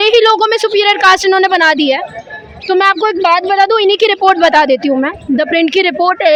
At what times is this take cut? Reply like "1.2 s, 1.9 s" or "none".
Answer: none